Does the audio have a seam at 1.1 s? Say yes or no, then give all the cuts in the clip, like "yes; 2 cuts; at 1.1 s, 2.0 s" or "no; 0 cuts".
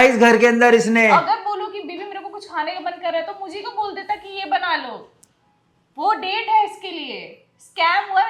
yes; 1 cut; at 1.1 s